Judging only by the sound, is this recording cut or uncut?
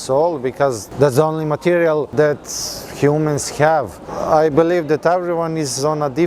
cut